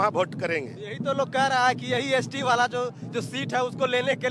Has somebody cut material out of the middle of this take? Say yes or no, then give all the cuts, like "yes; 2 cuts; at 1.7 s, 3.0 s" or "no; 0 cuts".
no; 0 cuts